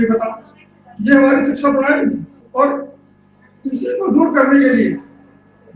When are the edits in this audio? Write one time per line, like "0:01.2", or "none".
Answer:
0:02.4